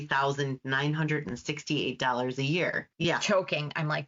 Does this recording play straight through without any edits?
no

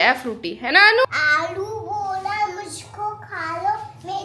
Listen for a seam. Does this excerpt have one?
yes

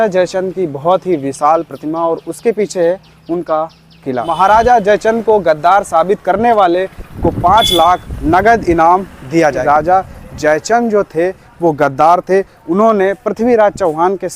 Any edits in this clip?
yes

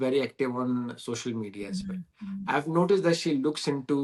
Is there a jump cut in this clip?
no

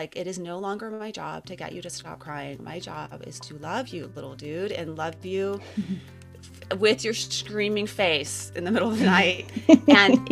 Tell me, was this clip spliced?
no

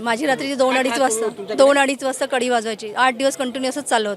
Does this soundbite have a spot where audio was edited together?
no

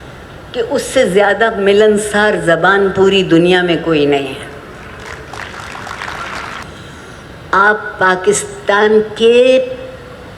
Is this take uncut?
no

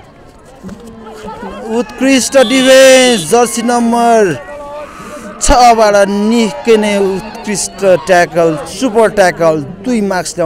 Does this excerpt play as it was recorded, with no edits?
yes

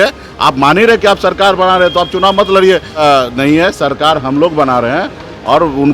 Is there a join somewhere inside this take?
yes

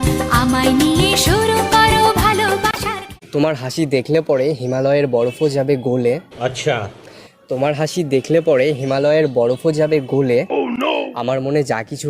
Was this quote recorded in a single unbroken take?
no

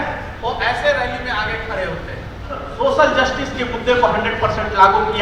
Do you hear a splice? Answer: yes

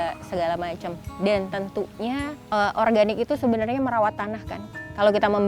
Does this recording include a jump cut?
yes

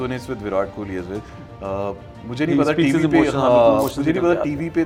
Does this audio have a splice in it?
no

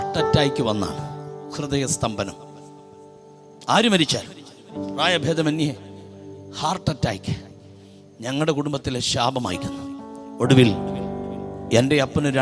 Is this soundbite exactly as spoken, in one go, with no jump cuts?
yes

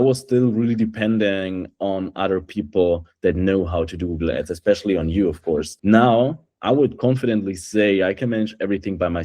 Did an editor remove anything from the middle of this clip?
yes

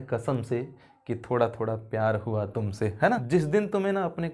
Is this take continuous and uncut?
no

